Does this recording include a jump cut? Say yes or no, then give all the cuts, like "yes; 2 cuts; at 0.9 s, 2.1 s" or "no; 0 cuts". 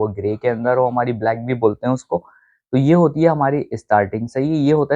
no; 0 cuts